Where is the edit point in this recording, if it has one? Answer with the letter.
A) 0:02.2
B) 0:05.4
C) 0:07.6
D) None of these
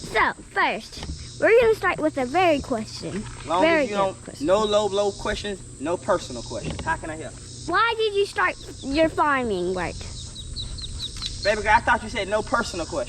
C